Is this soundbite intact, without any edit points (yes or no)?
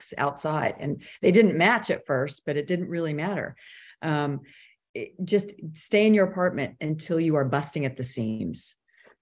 yes